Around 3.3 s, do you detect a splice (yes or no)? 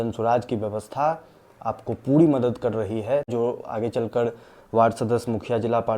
yes